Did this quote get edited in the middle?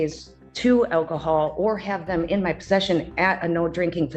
no; 0 cuts

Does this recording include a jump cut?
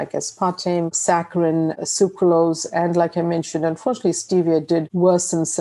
no; 0 cuts

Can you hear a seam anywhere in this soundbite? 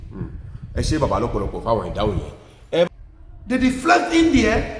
yes; 1 cut; at 2.9 s

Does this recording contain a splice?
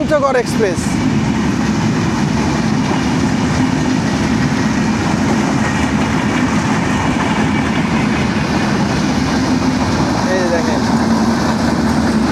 no; 0 cuts

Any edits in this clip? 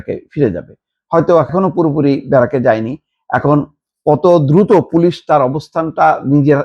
yes; 1 cut; at 1.5 s

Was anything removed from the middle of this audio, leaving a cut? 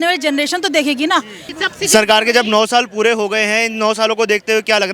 yes; 1 cut; at 1.6 s

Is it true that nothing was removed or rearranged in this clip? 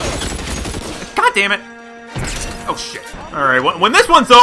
no; 1 cut; at 3.2 s

